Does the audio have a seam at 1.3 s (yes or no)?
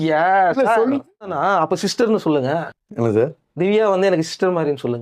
yes